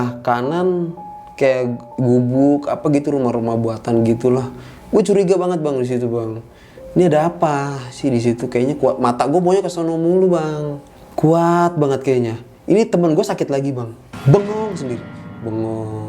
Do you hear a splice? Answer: yes; 1 cut; at 1.8 s

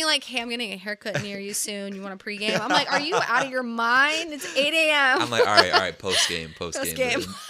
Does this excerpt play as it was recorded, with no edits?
yes; 0 cuts

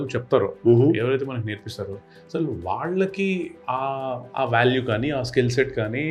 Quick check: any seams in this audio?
no; 0 cuts

